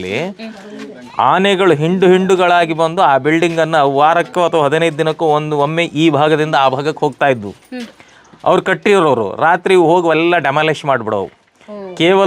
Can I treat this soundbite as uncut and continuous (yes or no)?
yes